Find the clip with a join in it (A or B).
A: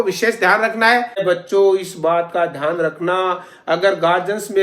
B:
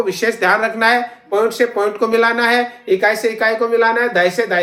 A